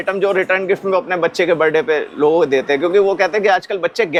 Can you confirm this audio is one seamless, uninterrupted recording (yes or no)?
yes